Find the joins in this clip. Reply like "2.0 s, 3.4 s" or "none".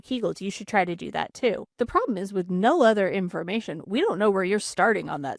1.7 s